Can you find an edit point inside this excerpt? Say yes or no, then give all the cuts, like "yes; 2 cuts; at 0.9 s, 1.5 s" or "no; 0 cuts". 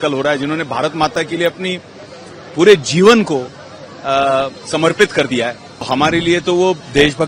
yes; 1 cut; at 5.9 s